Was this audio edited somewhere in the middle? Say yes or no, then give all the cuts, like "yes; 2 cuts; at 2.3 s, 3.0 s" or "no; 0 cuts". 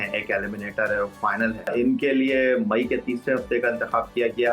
yes; 1 cut; at 1.7 s